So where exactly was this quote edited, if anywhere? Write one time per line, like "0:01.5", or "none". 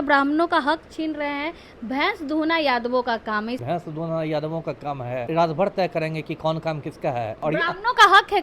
0:03.6
0:05.3
0:07.4